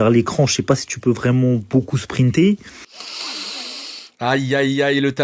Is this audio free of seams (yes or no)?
yes